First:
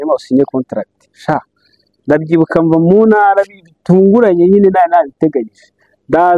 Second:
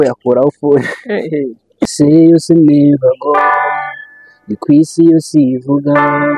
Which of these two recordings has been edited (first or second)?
second